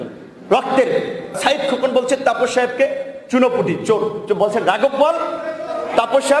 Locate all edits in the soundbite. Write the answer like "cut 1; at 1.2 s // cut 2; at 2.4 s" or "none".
cut 1; at 1.4 s